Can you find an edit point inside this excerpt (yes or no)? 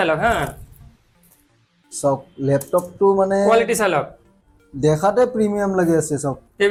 no